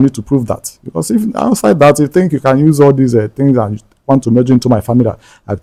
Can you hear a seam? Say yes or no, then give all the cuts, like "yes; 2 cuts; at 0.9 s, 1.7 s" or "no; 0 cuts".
no; 0 cuts